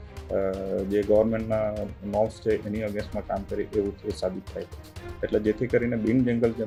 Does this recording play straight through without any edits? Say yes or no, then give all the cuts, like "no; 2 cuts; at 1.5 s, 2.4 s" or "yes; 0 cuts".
yes; 0 cuts